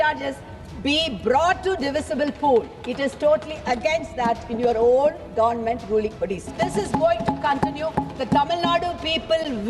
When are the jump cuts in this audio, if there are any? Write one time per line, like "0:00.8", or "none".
0:06.5

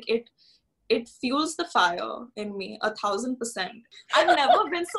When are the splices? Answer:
0:03.9

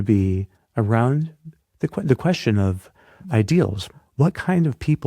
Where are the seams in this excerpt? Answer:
0:03.2
0:03.9

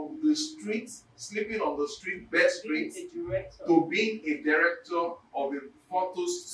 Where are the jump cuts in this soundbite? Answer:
none

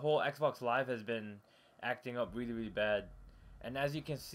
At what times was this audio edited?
0:01.0

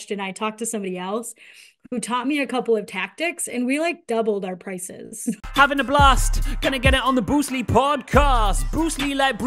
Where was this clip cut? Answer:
0:05.4

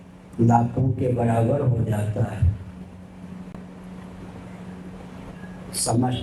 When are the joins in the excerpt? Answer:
none

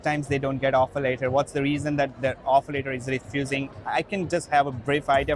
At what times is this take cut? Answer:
none

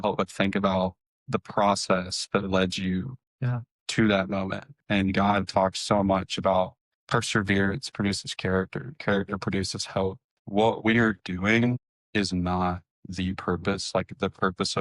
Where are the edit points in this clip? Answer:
0:04.7
0:10.4

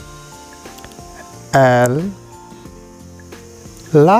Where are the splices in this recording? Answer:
0:01.5

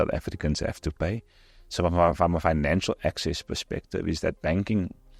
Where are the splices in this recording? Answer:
none

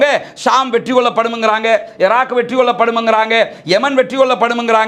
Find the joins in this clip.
none

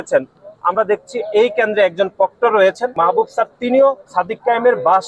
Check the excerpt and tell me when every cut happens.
0:02.9
0:04.0

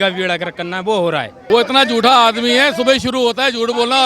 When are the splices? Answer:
0:01.3

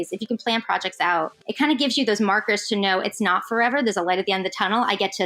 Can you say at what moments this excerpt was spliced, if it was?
0:01.4

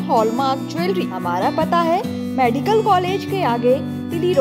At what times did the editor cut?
0:01.1

